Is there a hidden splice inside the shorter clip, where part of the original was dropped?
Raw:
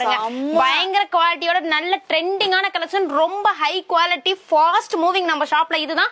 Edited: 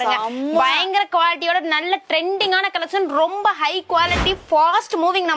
no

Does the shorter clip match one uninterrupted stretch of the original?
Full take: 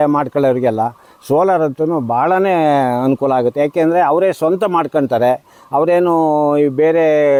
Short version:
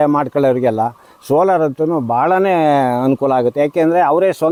yes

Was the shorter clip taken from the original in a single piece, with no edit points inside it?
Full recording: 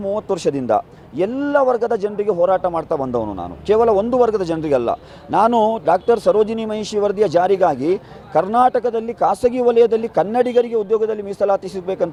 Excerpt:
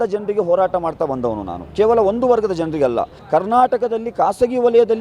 no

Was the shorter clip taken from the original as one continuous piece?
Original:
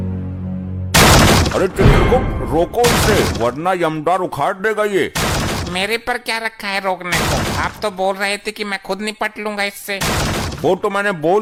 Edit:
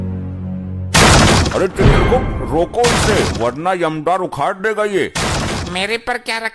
yes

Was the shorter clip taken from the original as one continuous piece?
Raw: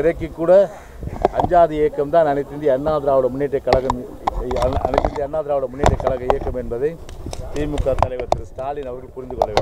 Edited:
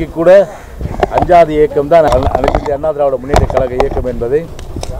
no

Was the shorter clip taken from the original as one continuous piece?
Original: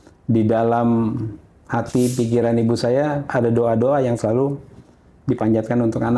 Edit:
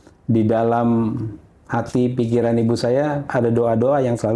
yes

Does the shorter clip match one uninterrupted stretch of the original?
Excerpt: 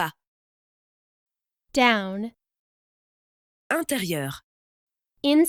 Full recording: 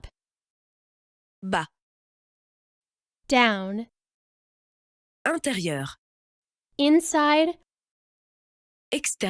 yes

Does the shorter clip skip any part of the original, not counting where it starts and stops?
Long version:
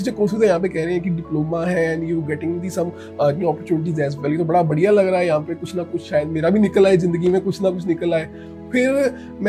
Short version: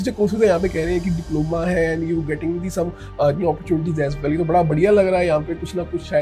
no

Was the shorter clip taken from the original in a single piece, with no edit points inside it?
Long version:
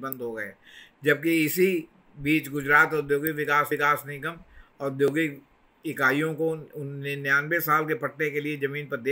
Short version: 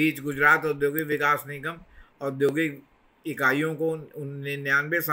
no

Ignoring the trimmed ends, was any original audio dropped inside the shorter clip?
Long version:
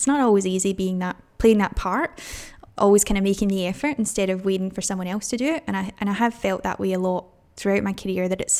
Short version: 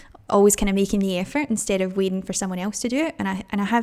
no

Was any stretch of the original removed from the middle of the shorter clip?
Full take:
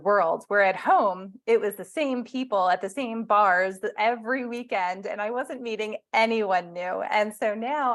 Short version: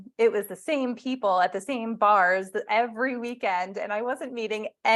no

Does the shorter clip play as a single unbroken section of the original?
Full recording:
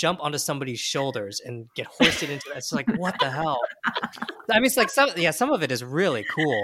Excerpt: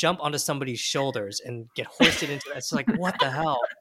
yes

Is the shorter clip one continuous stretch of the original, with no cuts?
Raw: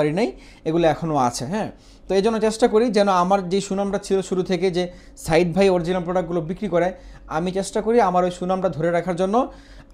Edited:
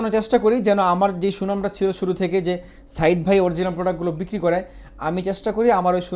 yes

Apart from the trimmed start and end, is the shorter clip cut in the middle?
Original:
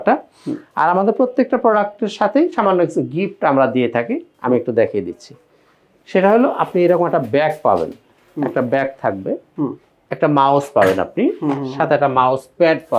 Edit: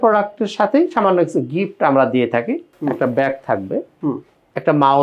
yes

